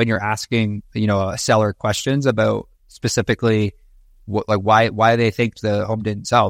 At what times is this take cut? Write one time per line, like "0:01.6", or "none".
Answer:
none

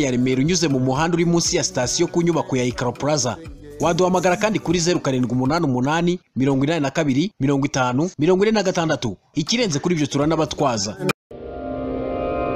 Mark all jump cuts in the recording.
0:11.2

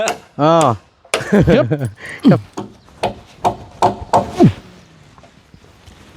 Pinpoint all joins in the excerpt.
0:01.5

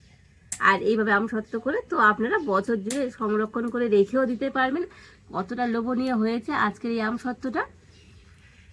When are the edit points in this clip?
none

